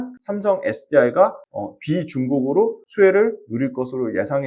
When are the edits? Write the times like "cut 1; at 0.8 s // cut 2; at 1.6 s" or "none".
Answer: none